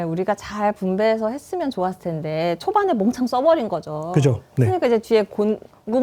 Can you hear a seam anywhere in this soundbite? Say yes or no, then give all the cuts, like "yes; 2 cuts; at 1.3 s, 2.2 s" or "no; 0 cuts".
no; 0 cuts